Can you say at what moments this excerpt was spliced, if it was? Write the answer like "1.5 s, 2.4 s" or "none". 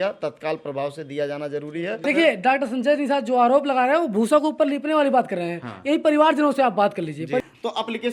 2.0 s, 7.4 s